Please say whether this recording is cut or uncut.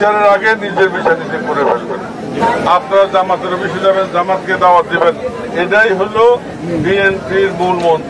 cut